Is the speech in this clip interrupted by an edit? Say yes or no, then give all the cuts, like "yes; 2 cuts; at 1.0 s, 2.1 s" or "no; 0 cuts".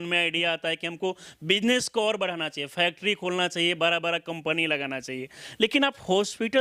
no; 0 cuts